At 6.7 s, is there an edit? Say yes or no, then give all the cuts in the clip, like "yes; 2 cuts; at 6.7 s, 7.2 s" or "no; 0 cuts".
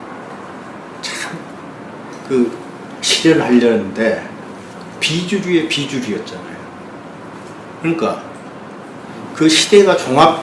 no; 1 cut; at 3.7 s